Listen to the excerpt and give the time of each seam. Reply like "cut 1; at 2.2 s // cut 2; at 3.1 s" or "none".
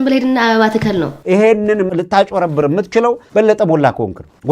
cut 1; at 1.2 s